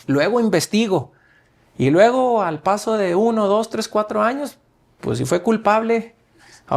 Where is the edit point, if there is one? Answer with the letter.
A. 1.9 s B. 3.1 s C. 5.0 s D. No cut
D